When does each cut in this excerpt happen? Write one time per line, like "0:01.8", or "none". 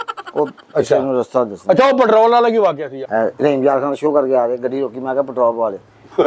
0:02.9